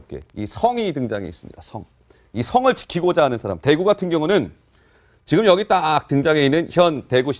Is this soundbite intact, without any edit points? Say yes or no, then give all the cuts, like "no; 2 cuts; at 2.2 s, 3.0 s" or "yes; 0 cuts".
no; 1 cut; at 6.5 s